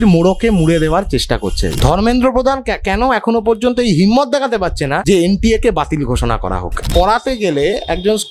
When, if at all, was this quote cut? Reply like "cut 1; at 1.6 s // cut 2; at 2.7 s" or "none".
cut 1; at 1.7 s // cut 2; at 5.0 s // cut 3; at 6.9 s